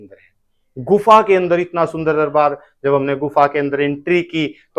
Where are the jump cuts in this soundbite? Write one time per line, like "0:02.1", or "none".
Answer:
none